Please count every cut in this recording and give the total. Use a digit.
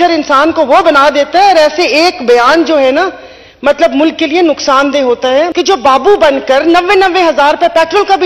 1